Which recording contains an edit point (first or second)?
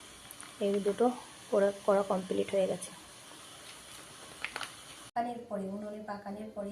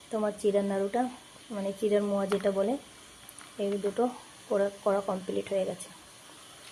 first